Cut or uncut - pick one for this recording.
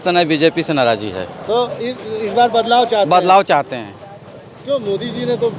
uncut